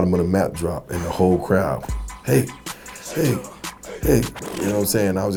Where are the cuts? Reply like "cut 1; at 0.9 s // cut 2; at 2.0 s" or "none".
none